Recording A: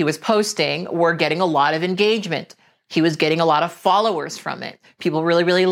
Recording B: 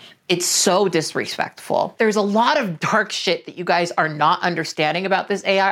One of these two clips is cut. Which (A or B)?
B